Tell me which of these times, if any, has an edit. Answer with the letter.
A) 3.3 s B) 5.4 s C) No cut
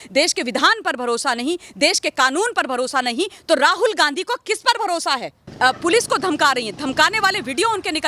B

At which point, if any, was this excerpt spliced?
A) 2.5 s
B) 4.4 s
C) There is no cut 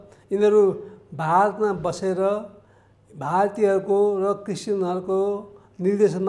C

